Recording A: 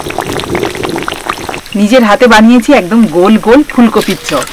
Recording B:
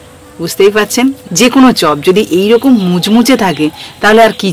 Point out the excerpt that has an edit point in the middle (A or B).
A